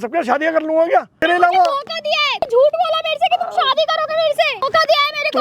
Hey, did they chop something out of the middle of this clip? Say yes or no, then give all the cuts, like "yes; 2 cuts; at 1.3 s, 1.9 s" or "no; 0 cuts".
yes; 2 cuts; at 1.2 s, 2.4 s